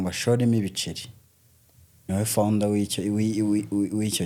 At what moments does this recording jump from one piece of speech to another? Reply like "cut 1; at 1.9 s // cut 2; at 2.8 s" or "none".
none